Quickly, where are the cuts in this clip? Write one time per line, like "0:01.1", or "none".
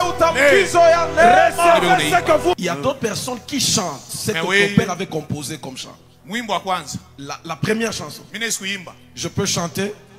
0:02.6